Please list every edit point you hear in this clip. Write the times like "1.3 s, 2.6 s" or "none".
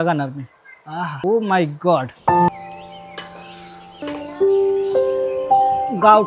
1.1 s, 2.5 s, 4.0 s